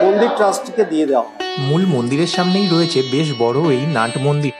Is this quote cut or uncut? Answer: cut